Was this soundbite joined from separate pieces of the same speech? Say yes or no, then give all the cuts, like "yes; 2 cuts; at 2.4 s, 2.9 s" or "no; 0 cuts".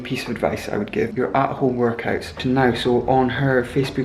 yes; 2 cuts; at 1.1 s, 2.3 s